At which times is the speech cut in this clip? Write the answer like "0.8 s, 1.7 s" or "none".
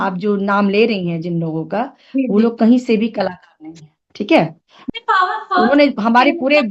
4.7 s